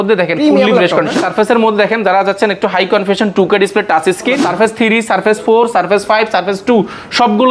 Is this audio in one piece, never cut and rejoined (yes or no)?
no